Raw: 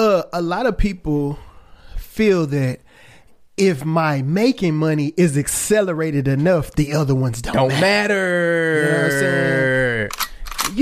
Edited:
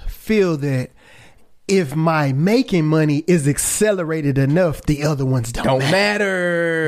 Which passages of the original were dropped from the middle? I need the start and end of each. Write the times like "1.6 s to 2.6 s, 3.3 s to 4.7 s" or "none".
none